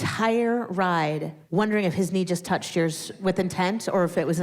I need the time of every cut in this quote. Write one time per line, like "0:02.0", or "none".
0:01.3
0:03.1

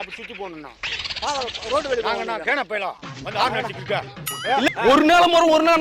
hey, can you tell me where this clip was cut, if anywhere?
0:04.7

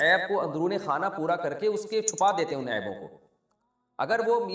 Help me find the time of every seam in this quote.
none

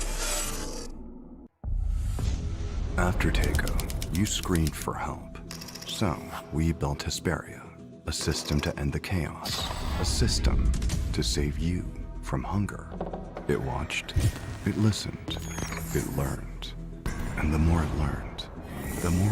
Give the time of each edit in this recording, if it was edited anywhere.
0:01.5

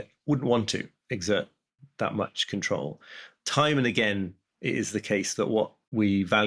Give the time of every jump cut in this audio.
none

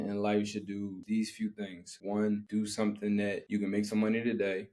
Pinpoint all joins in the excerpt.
0:01.0
0:01.9
0:02.4
0:03.4

